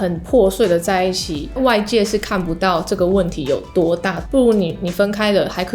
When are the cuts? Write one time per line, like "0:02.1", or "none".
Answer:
0:01.4
0:04.2